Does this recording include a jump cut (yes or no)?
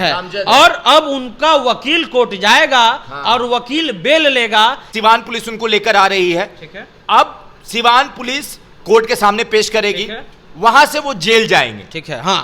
yes